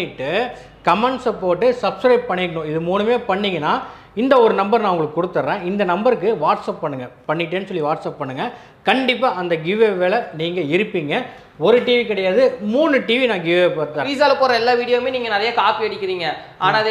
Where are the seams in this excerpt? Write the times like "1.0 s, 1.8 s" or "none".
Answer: 14.0 s